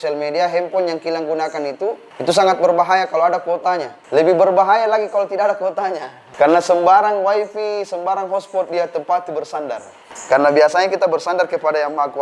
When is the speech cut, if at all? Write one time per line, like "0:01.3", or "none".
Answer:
0:02.1
0:03.9
0:06.2
0:10.1